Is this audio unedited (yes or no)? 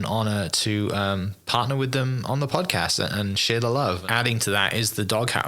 no